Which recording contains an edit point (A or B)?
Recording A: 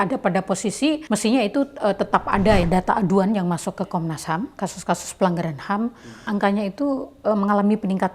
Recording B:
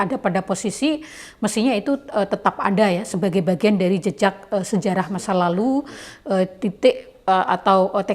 A